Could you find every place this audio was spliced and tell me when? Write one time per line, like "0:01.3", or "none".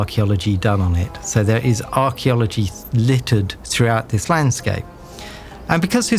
0:03.6